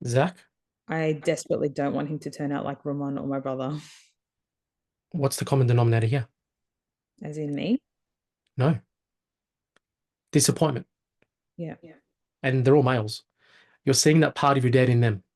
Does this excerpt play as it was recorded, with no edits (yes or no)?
yes